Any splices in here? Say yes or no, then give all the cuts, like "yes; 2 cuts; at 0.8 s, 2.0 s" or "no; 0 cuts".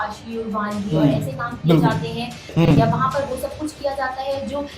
yes; 1 cut; at 2.5 s